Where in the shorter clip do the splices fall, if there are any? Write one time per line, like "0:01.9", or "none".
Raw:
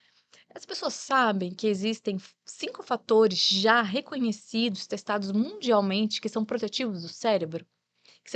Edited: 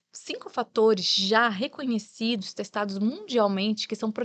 none